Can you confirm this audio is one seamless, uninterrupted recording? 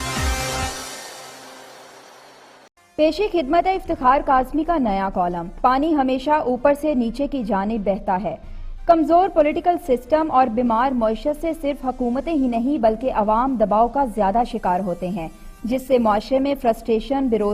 no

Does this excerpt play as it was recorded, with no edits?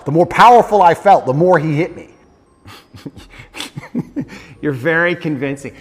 no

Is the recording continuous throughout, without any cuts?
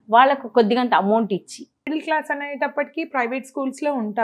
no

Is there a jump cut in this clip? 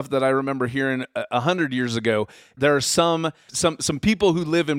yes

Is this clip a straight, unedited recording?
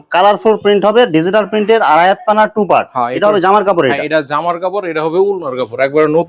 yes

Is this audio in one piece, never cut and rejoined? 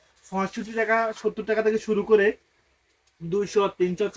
yes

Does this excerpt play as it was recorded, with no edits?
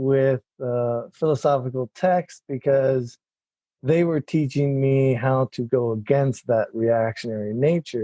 yes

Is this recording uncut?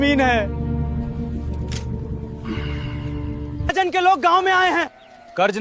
no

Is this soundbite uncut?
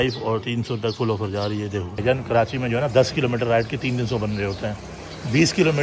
no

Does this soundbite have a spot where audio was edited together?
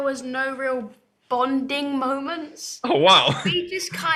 no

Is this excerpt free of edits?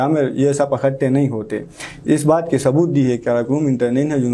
yes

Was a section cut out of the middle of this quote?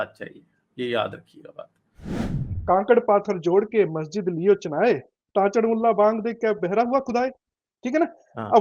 yes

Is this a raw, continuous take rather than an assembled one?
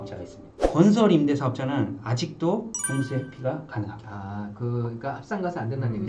yes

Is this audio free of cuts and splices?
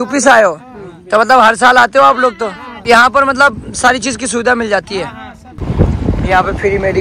no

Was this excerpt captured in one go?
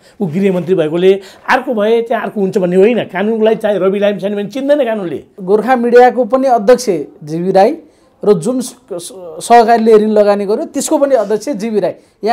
no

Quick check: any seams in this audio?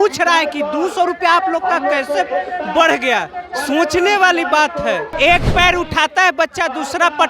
yes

